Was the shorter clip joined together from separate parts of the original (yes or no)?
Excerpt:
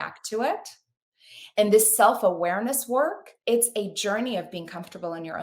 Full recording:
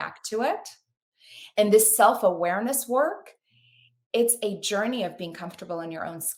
yes